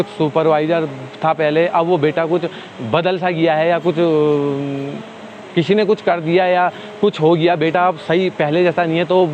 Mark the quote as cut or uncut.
uncut